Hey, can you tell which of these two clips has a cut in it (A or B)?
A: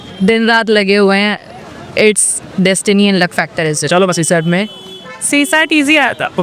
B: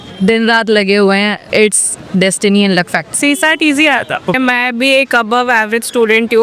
B